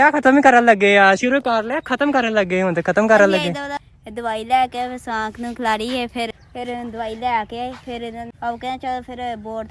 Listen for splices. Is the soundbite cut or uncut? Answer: cut